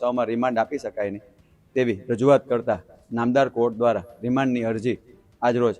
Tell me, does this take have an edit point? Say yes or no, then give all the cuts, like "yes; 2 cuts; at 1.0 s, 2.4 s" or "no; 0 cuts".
no; 0 cuts